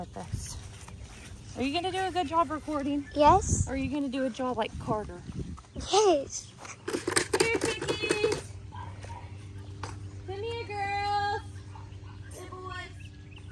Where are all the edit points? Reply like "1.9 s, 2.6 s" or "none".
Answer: none